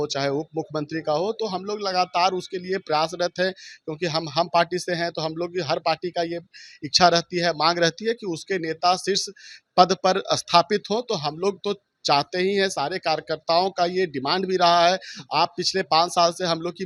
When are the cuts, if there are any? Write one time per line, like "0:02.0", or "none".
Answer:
none